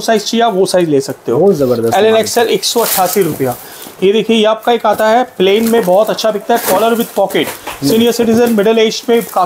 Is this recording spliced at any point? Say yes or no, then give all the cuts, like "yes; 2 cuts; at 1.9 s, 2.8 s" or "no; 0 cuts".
no; 0 cuts